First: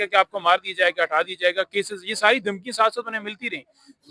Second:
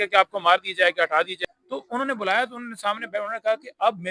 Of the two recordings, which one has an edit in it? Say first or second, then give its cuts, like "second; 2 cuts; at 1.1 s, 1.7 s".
second; 1 cut; at 1.3 s